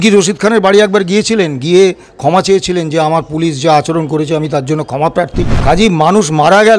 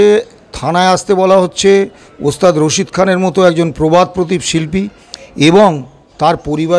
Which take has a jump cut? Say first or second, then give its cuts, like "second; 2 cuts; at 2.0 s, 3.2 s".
first; 1 cut; at 5.5 s